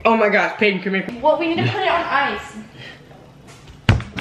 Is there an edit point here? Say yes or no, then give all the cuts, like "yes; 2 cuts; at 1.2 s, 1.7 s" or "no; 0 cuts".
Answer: yes; 1 cut; at 1.1 s